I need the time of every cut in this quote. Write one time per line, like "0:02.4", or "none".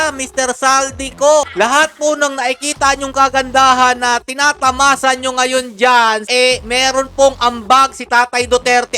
0:01.5